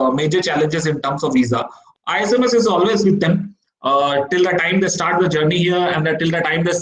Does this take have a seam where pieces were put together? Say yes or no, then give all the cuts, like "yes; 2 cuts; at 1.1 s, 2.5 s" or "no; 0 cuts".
yes; 1 cut; at 1.8 s